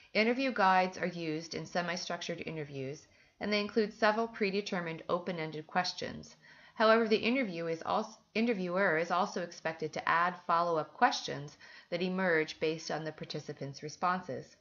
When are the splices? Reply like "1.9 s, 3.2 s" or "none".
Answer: 7.2 s